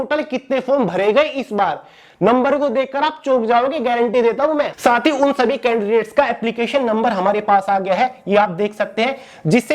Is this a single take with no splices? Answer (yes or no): no